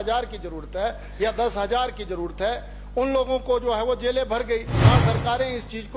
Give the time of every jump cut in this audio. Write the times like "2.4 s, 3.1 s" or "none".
4.7 s